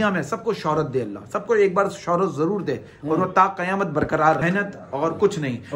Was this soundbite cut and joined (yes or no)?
yes